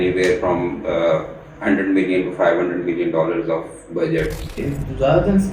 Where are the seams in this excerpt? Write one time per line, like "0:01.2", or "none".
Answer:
0:04.5